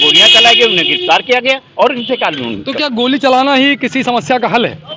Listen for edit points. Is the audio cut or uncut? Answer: uncut